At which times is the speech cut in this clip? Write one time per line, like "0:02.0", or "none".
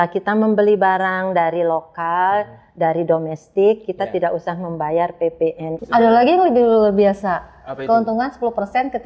0:05.7

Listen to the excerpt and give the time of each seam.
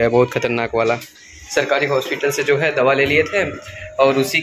0:01.4

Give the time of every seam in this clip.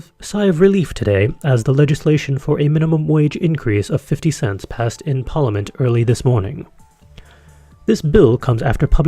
0:01.0

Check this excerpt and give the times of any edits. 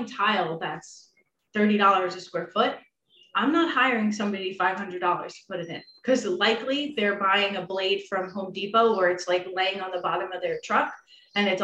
none

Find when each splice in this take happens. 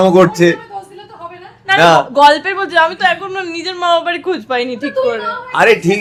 none

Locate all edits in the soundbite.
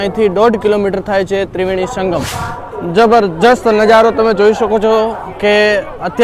0:02.3

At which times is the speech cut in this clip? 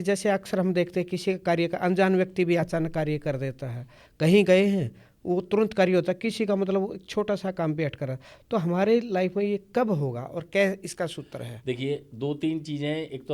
none

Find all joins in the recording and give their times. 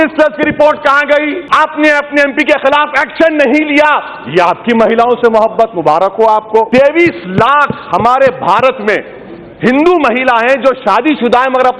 0:01.4
0:06.7

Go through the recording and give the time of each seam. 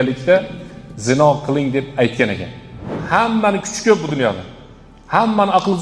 0:02.9

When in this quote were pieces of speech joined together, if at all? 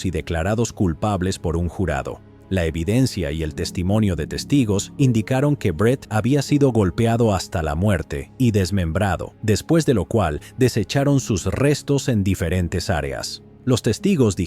0:06.1
0:09.3

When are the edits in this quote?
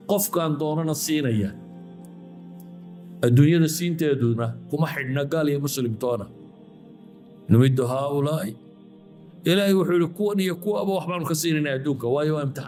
none

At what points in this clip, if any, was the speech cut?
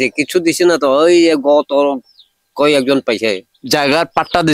0:03.5

